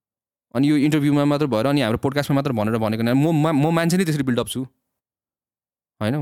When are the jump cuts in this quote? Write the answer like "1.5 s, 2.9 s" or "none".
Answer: none

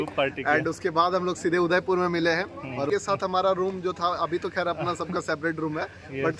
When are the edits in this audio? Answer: 2.9 s

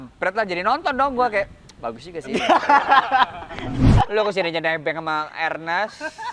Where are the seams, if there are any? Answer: 3.9 s

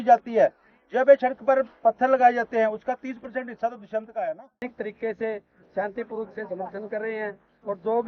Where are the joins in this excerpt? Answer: 4.6 s

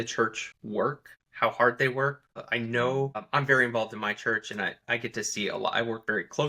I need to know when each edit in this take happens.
0.8 s, 2.3 s, 3.2 s, 4.8 s

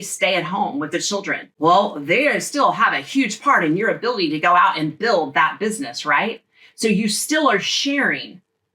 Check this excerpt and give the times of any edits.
1.4 s

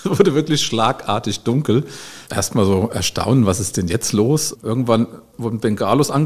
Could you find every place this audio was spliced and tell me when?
2.2 s, 4.5 s, 5.4 s

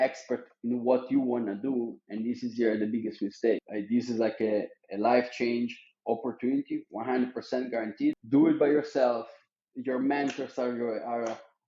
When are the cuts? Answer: 3.7 s, 8.2 s

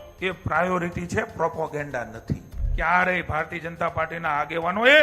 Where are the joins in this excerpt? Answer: 2.6 s

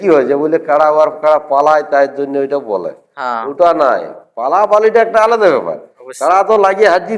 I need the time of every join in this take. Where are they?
none

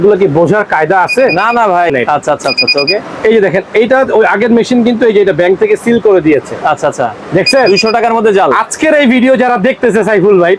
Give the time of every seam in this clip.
1.9 s

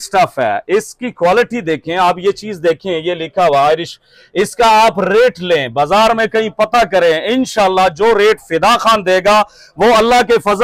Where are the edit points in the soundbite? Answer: none

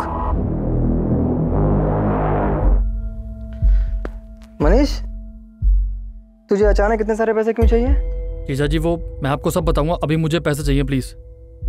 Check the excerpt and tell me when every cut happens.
2.7 s

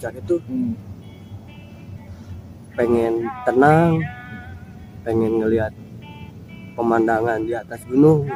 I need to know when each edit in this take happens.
none

